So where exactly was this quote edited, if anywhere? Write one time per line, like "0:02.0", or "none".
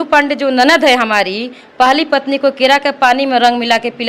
none